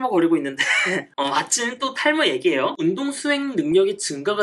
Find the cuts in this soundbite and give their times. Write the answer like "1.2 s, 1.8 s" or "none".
1.1 s, 2.8 s

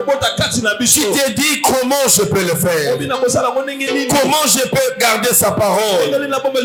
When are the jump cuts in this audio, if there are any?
none

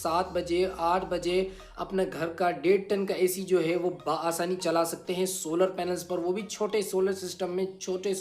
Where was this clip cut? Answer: none

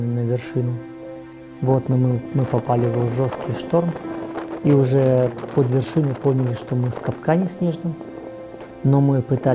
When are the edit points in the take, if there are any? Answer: none

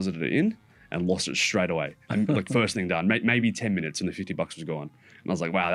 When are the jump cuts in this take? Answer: none

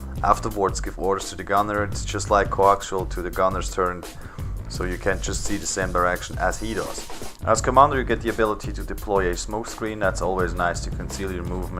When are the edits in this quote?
none

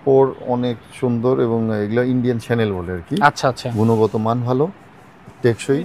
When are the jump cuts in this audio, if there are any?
none

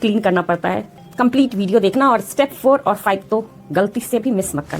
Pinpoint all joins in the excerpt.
1.0 s

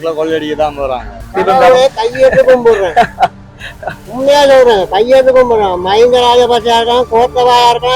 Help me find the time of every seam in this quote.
1.3 s

